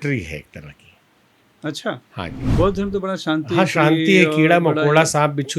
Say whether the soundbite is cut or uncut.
cut